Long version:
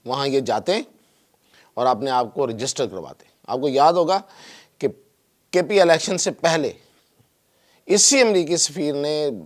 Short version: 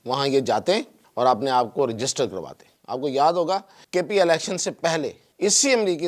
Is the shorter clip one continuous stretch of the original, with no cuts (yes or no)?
no